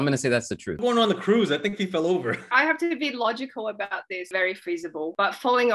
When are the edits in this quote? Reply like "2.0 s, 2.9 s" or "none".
2.4 s, 4.3 s